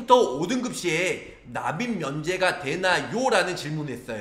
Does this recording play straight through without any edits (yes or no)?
yes